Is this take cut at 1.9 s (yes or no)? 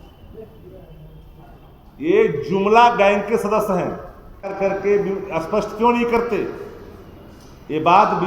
no